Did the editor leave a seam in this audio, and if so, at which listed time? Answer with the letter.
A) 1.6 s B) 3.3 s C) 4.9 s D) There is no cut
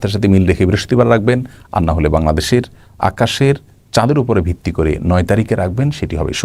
D